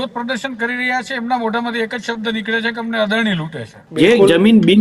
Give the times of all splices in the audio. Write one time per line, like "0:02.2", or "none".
0:03.8